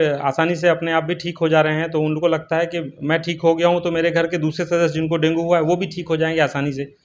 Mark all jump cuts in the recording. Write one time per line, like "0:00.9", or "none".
none